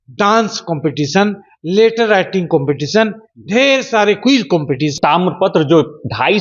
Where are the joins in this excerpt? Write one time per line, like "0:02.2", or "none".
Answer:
0:04.9